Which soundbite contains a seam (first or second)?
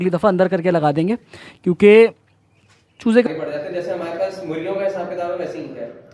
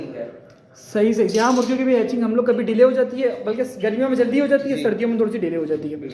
first